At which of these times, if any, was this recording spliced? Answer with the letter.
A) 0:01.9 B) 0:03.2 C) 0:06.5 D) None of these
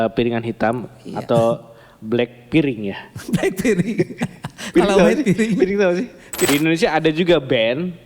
C